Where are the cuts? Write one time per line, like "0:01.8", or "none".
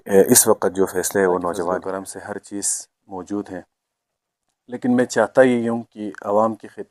0:01.8